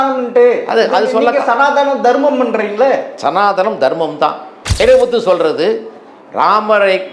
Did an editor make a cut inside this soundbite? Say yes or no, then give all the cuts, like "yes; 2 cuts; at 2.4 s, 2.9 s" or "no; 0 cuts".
yes; 1 cut; at 4.8 s